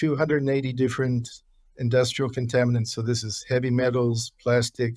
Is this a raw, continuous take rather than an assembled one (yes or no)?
yes